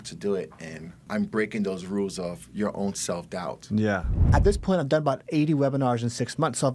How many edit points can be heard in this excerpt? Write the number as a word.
two